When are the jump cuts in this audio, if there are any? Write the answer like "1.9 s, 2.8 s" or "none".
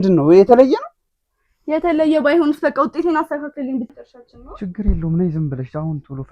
3.9 s